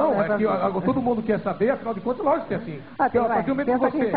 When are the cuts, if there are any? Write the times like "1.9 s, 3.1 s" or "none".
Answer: none